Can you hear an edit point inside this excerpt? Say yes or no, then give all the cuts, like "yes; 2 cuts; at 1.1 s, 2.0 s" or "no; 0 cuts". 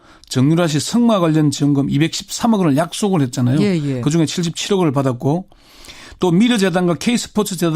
yes; 1 cut; at 4.5 s